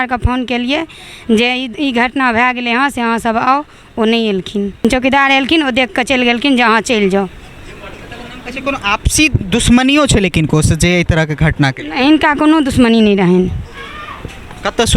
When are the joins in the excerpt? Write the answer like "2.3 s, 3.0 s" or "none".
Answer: 4.8 s

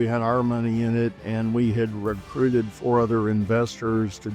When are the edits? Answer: none

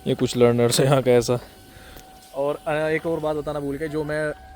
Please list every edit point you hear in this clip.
1.8 s

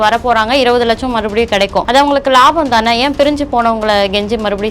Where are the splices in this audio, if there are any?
1.9 s

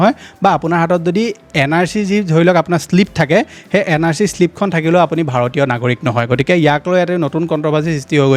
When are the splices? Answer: none

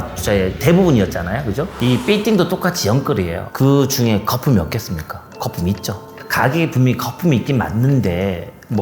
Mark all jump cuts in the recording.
3.4 s

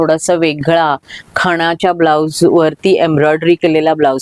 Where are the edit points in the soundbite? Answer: none

